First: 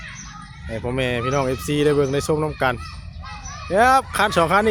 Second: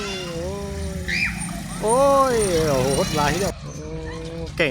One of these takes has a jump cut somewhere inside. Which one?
second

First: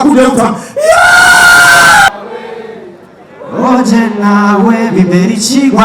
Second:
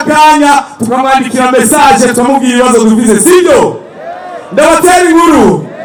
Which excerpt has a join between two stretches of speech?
first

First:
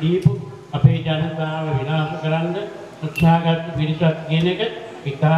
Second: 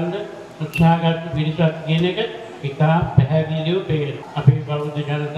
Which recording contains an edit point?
second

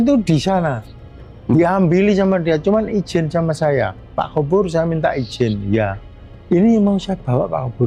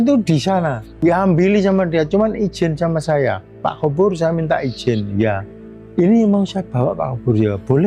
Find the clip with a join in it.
second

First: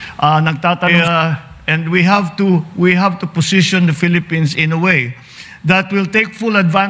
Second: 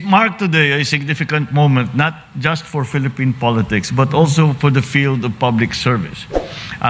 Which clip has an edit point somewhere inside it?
first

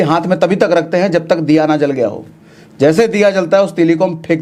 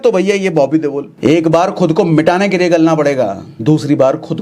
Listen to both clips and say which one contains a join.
second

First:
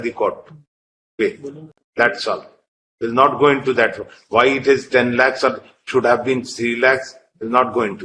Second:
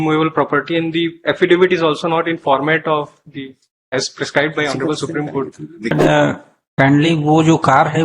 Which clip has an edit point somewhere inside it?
second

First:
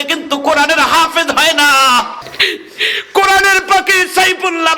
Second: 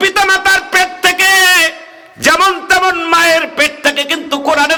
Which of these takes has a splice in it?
first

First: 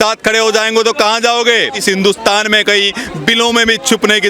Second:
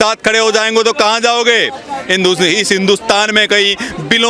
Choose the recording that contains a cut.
first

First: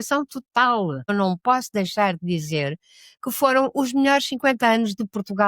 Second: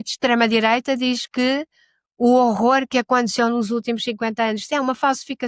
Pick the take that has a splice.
first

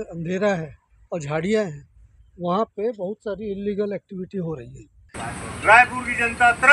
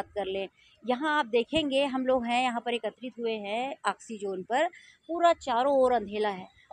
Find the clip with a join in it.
first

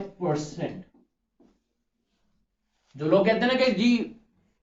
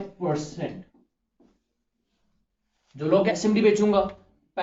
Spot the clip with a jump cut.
second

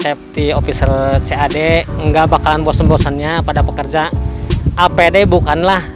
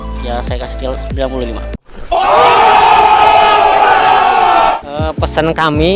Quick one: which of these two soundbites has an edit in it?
second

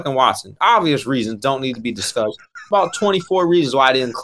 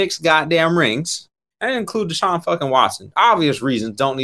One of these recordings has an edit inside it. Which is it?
second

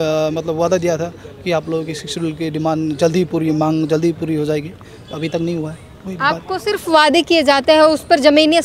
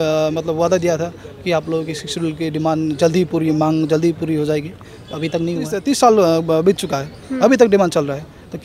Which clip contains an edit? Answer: second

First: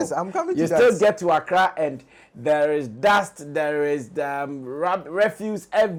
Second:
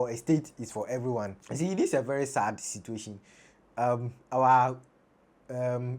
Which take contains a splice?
second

